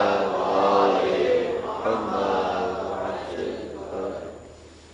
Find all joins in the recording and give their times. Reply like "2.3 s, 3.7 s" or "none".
3.3 s